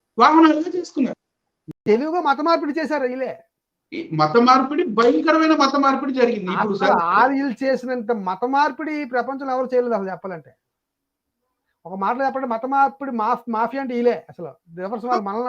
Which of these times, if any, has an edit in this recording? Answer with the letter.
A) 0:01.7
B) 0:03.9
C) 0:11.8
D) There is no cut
A